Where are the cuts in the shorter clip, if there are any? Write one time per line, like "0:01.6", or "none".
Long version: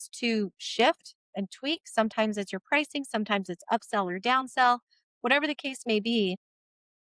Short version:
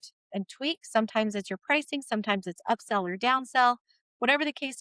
none